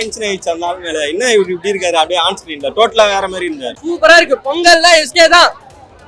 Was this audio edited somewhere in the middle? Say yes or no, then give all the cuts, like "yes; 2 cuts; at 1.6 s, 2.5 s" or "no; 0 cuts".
yes; 1 cut; at 3.7 s